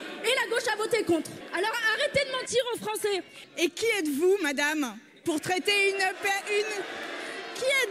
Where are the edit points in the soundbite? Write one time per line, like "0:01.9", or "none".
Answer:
0:01.4
0:03.4

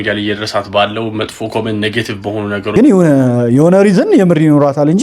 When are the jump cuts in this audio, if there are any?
0:02.7

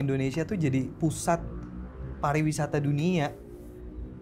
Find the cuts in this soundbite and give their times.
none

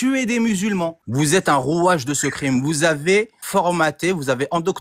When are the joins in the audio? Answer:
0:01.0
0:03.4

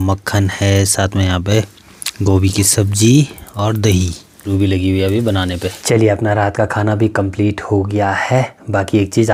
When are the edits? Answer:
none

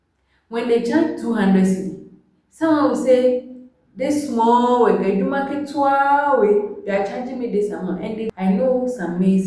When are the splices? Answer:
0:08.3

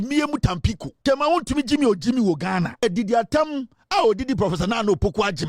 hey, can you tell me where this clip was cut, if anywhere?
0:00.9
0:02.8

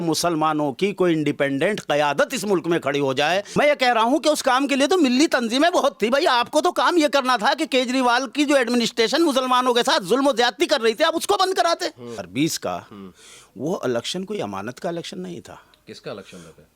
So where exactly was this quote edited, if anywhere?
0:03.5
0:12.2

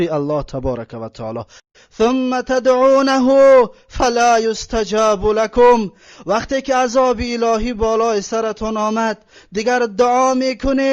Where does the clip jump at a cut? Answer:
0:01.6

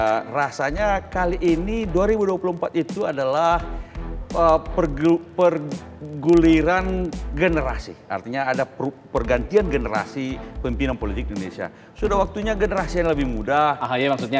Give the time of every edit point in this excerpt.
none

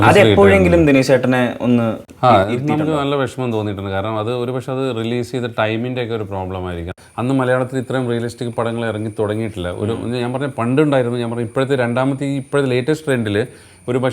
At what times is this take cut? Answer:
0:02.0
0:06.9

